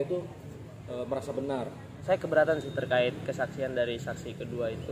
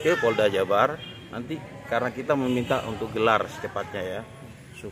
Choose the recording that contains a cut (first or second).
first